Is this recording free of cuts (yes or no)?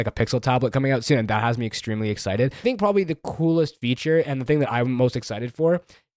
no